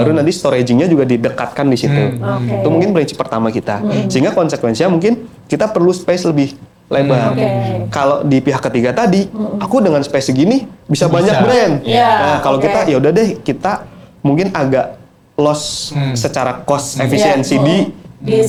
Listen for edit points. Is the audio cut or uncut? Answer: uncut